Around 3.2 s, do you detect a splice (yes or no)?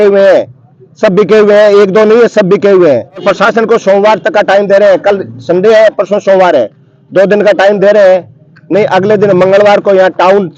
yes